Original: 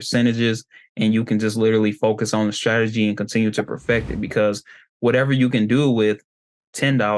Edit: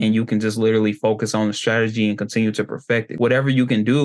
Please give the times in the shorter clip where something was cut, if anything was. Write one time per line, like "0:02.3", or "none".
0:03.1